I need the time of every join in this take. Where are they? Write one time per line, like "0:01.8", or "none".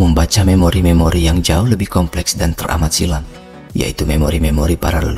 none